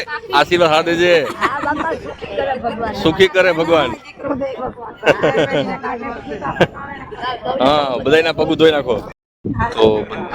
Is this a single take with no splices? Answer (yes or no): no